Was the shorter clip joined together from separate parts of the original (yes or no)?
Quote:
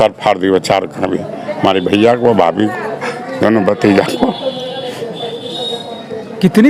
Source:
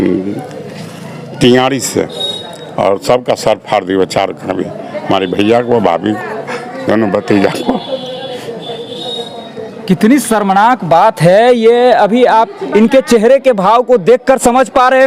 no